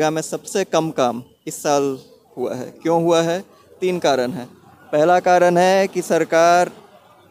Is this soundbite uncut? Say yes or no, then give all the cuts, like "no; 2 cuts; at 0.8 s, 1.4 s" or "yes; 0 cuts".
yes; 0 cuts